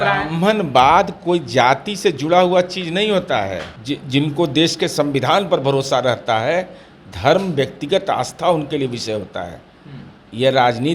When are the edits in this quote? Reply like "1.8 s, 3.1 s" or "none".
3.7 s

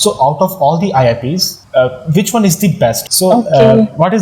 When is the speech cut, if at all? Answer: 1.5 s, 3.1 s

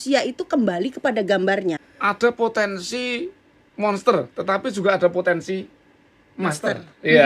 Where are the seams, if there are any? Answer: 1.9 s

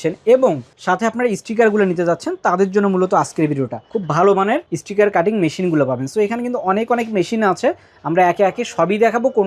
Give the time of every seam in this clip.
3.9 s

